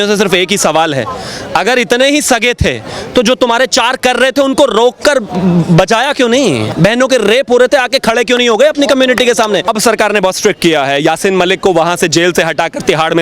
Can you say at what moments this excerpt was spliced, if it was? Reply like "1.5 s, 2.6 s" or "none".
6.7 s, 9.7 s